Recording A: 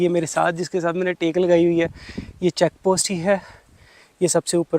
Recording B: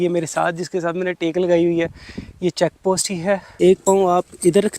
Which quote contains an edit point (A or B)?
B